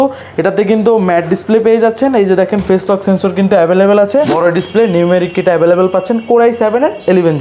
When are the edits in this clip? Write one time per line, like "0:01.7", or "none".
0:04.3